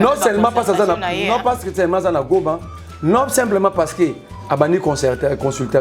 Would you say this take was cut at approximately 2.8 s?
no; 0 cuts

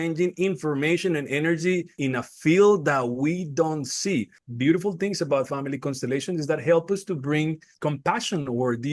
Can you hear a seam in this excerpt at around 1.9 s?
yes; 2 cuts; at 1.9 s, 4.4 s

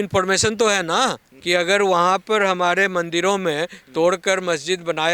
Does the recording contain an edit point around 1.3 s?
yes; 1 cut; at 1.3 s

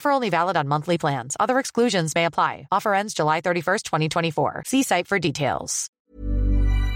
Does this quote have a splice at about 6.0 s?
yes; 1 cut; at 6.0 s

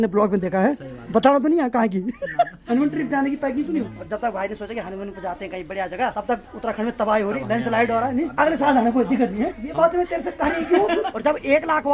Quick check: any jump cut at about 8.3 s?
yes; 7 cuts; at 0.9 s, 2.6 s, 3.9 s, 6.2 s, 8.3 s, 9.6 s, 11.1 s

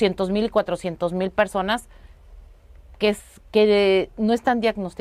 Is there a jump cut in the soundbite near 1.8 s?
no; 0 cuts

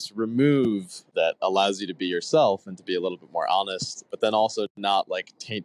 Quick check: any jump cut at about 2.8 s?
no; 2 cuts; at 1.1 s, 4.1 s

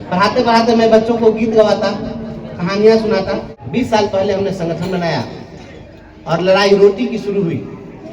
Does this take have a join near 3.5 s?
yes; 1 cut; at 3.5 s

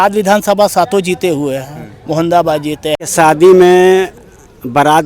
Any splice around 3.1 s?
yes; 1 cut; at 3.1 s

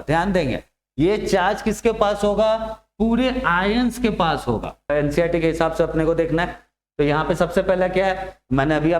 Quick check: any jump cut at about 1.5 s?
no; 1 cut; at 4.9 s

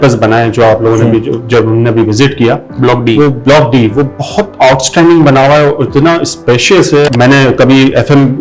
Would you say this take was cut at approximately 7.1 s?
yes; 1 cut; at 7.1 s

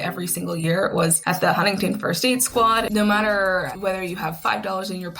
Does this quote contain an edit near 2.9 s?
yes; 3 cuts; at 1.2 s, 2.9 s, 3.7 s

